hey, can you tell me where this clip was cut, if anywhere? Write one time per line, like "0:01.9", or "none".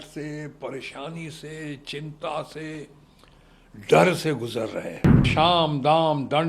0:05.3